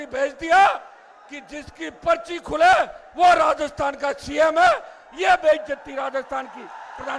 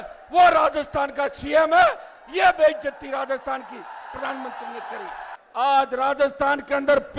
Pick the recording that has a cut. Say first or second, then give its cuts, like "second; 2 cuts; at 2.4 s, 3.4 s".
second; 1 cut; at 5.3 s